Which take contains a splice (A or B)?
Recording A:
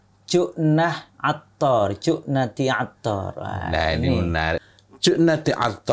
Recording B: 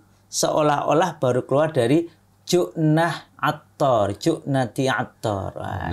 A